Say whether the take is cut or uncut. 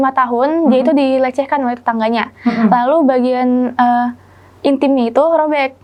uncut